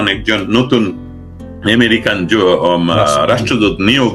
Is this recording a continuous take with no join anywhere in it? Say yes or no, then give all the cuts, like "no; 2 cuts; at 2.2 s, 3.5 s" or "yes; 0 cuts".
yes; 0 cuts